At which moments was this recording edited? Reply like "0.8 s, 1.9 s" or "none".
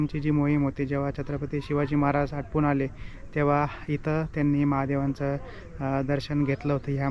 none